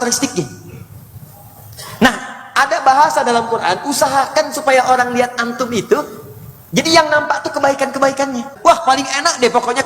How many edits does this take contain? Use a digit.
1